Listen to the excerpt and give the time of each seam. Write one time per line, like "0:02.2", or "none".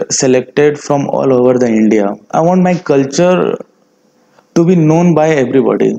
0:02.2

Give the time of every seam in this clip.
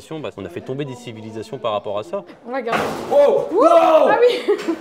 0:02.3

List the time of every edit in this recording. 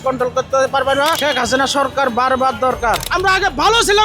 0:01.2
0:03.1

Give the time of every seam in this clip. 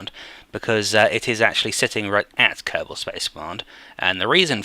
0:01.7

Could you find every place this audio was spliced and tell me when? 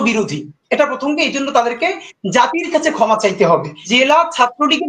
0:03.8

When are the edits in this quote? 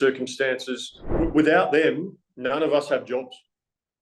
0:01.0

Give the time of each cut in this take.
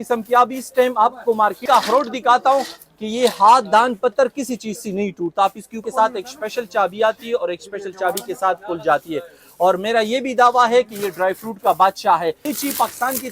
0:01.6
0:05.8
0:12.4

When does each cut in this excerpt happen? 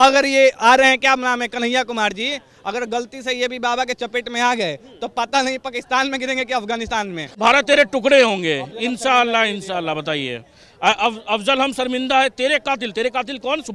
0:07.4

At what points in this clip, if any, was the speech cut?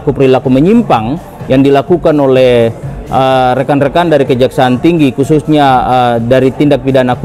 none

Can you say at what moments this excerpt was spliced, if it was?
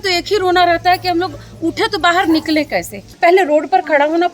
0:03.0

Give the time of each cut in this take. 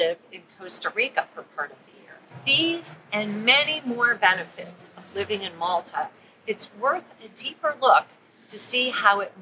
0:02.4

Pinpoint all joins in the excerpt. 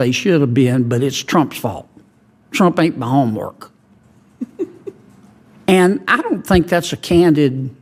none

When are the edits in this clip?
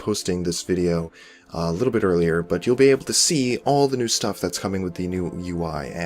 0:01.7

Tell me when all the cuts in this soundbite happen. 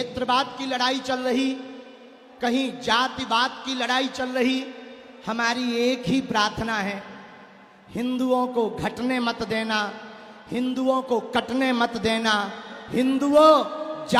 none

